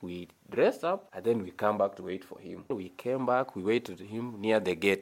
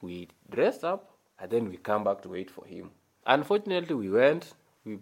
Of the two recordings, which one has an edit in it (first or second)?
first